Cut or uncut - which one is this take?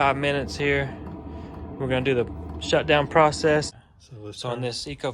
cut